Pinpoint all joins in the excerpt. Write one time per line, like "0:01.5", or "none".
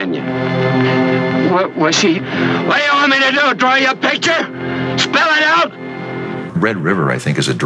0:06.4